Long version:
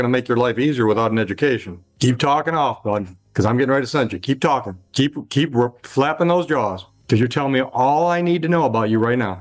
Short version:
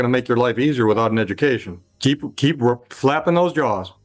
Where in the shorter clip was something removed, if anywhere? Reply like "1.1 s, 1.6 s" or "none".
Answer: 1.8 s